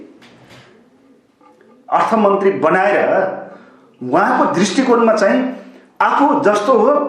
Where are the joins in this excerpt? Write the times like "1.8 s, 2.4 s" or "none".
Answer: none